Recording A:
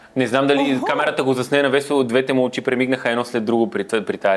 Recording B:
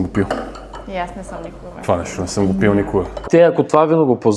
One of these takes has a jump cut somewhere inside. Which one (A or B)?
B